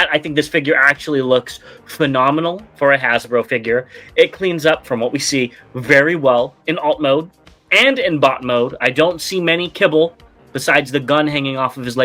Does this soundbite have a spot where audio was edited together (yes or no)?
no